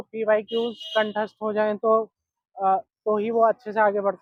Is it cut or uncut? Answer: uncut